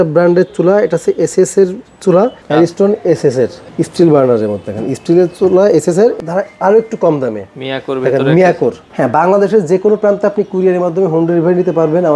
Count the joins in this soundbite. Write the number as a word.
four